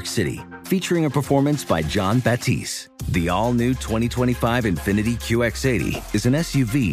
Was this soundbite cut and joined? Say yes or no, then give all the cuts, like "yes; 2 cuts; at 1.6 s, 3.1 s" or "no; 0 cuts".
no; 0 cuts